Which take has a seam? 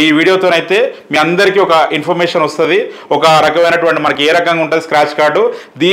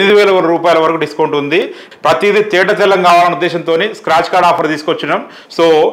second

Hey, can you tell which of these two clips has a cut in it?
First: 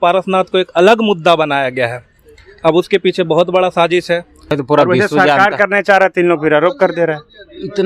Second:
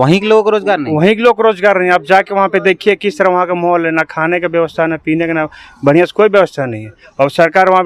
first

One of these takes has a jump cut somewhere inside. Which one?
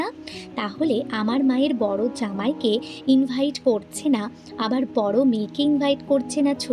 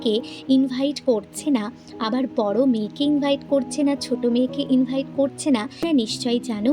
second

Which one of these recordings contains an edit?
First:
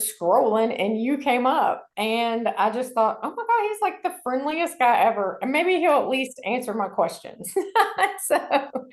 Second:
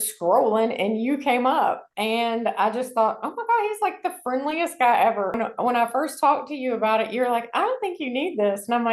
second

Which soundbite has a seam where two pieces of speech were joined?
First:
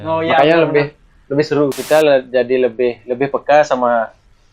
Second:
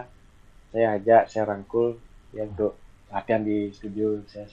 first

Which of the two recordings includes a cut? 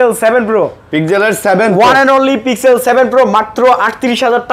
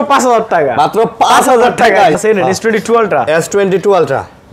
second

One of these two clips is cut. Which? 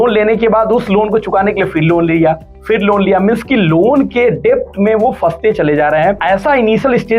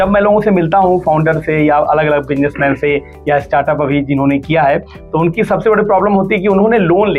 first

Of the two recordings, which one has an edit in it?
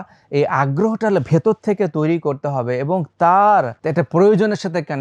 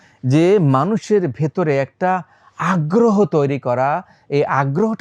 first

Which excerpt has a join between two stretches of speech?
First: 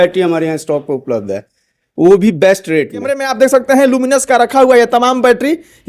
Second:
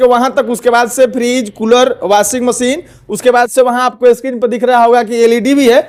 first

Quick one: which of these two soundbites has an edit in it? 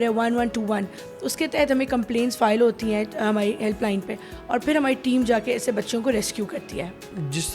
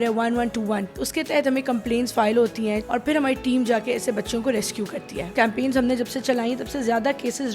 second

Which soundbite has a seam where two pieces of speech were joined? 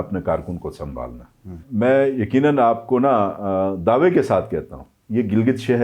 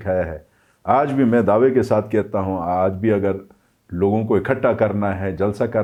first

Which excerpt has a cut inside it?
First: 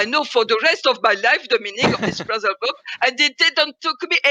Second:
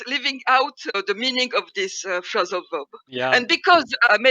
second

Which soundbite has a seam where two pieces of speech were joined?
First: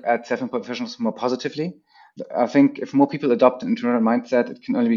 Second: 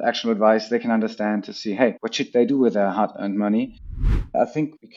second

